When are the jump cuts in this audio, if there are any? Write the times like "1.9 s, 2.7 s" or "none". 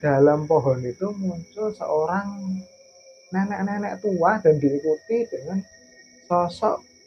none